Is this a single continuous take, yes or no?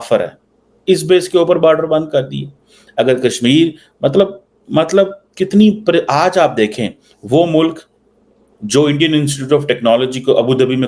yes